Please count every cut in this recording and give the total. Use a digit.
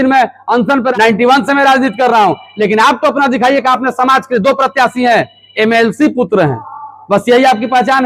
1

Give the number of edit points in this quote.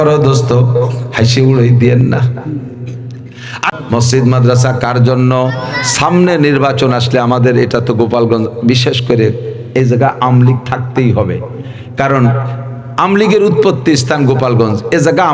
1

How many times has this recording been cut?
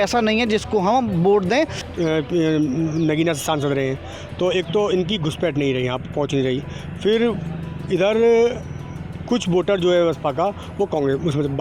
1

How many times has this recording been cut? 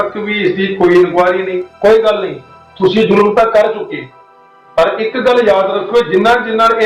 1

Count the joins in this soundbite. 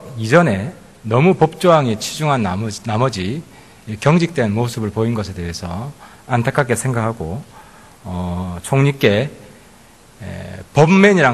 1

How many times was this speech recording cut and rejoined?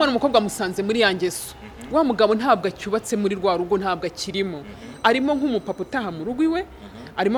0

